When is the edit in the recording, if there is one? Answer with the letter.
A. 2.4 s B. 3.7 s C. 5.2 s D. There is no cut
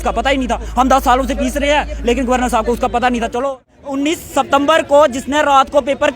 B